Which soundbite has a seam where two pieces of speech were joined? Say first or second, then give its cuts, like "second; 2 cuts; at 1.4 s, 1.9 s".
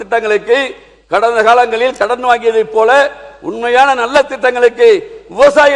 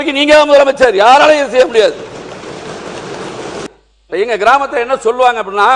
second; 1 cut; at 3.6 s